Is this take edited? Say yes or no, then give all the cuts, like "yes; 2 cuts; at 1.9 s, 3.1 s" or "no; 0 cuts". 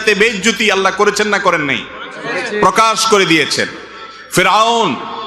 no; 0 cuts